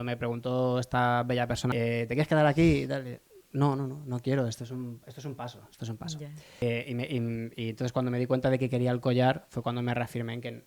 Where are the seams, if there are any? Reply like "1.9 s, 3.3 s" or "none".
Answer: 1.7 s, 6.6 s